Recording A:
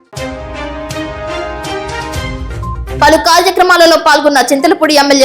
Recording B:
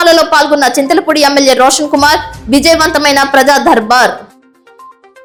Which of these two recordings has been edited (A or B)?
A